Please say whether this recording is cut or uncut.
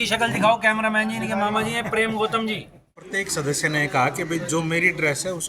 cut